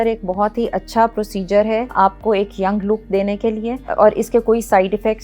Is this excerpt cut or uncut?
cut